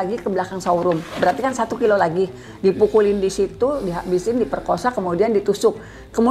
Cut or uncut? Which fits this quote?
uncut